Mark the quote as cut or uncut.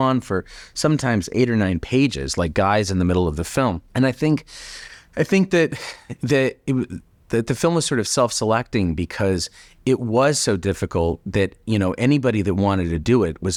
uncut